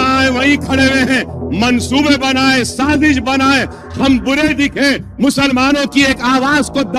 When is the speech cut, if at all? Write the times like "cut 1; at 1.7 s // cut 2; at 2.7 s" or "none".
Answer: none